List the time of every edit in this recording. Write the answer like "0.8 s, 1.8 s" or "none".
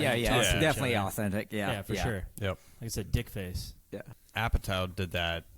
4.2 s